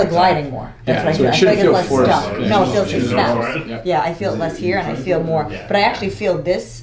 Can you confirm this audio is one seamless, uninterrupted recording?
yes; 0 cuts

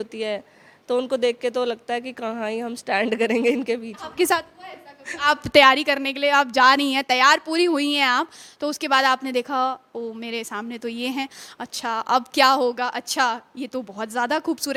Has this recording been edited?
no; 0 cuts

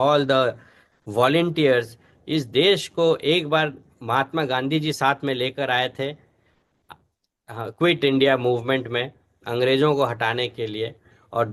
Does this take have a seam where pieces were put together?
no; 0 cuts

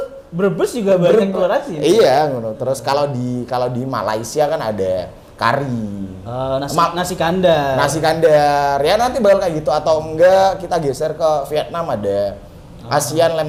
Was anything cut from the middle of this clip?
no; 0 cuts

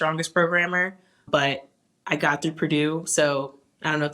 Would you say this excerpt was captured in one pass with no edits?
no; 1 cut; at 1.2 s

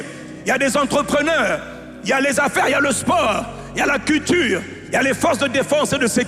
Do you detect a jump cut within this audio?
no; 0 cuts

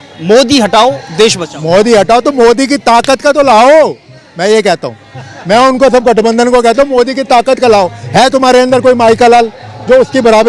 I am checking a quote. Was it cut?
no; 0 cuts

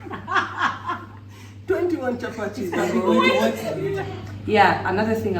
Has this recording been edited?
yes; 1 cut; at 3.9 s

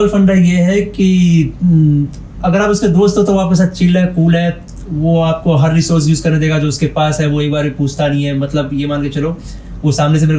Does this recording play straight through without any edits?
yes; 0 cuts

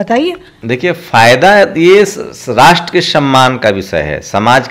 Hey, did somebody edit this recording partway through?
no; 0 cuts

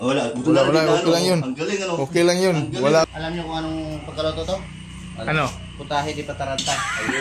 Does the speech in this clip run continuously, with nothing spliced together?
no; 1 cut; at 3.1 s

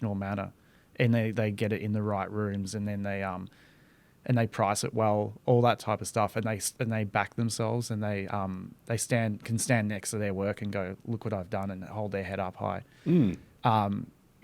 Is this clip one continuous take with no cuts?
yes; 0 cuts

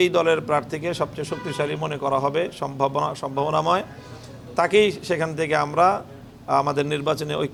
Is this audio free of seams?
yes; 0 cuts

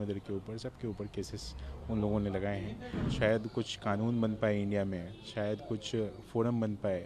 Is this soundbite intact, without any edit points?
no; 1 cut; at 3.1 s

